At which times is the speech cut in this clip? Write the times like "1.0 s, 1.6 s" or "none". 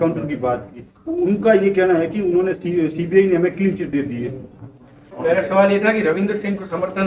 5.1 s